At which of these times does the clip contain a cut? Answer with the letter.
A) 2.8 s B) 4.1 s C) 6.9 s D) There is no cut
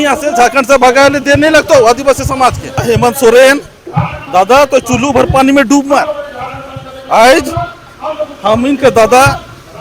A